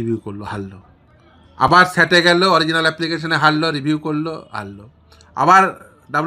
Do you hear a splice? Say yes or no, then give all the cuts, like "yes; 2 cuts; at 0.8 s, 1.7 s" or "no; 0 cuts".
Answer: no; 0 cuts